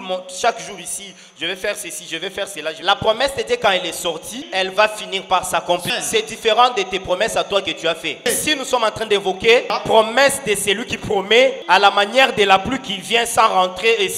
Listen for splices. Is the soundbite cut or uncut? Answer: cut